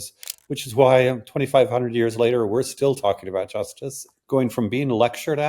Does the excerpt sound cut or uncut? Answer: cut